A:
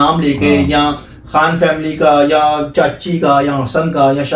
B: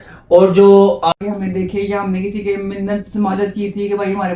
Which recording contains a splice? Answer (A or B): B